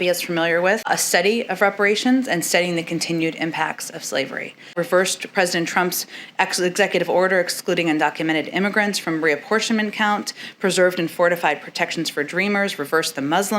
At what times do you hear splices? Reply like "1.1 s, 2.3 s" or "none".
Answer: 4.7 s